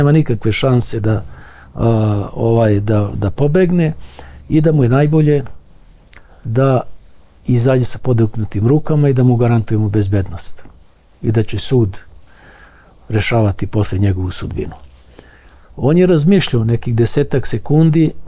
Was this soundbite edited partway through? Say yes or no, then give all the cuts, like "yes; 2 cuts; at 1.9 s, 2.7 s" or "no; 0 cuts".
no; 0 cuts